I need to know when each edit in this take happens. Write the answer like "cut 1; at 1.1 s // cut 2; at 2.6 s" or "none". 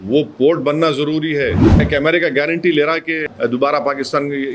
cut 1; at 1.8 s // cut 2; at 3.3 s